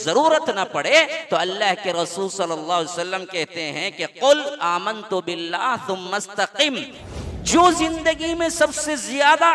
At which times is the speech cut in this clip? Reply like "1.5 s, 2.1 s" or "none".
6.9 s